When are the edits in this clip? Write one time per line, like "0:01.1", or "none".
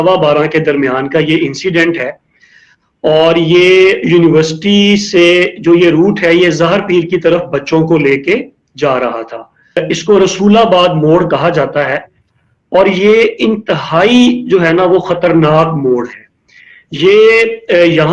0:09.8